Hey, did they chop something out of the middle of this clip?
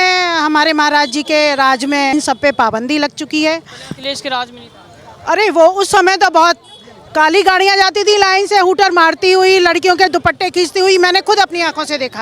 no; 0 cuts

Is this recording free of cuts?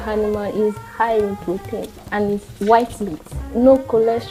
yes; 0 cuts

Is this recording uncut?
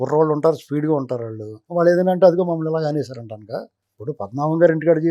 yes; 0 cuts

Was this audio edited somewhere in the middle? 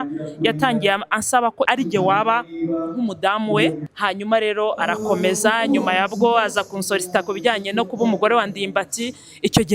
yes; 2 cuts; at 1.7 s, 3.8 s

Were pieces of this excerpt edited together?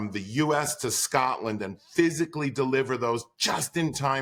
no; 0 cuts

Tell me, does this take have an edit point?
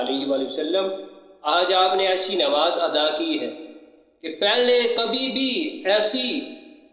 no; 0 cuts

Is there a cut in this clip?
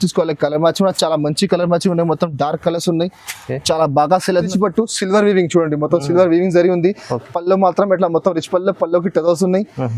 yes; 1 cut; at 4.5 s

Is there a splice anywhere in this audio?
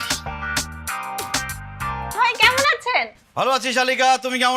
yes; 1 cut; at 2.2 s

